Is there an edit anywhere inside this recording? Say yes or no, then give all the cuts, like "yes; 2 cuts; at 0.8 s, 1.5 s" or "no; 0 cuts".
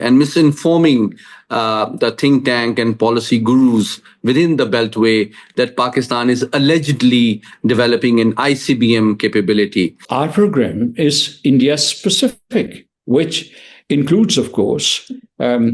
yes; 1 cut; at 10.0 s